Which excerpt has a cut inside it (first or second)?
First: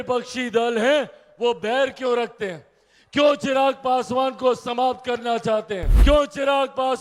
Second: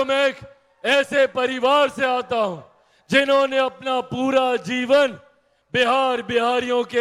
first